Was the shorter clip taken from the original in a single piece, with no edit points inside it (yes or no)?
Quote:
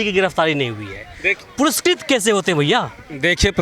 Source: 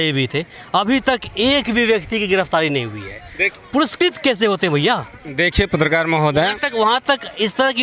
yes